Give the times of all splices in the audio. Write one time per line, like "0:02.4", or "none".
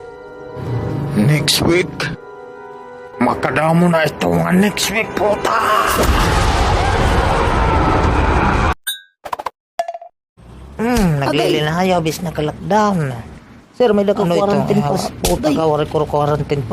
0:10.1